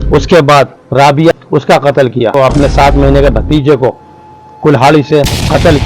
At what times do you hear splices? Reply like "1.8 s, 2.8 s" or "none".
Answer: 1.3 s, 2.3 s